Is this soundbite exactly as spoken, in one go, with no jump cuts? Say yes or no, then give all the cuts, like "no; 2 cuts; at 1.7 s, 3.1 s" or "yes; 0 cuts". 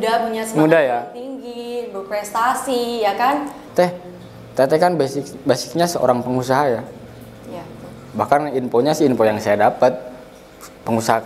no; 1 cut; at 3.7 s